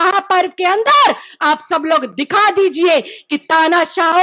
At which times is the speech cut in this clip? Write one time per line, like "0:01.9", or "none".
none